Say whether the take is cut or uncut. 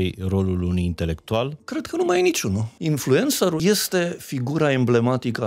cut